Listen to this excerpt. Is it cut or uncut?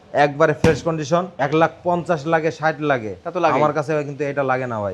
cut